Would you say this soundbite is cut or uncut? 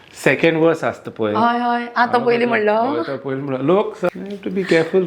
cut